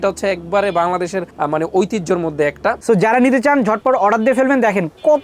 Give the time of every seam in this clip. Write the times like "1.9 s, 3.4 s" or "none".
2.8 s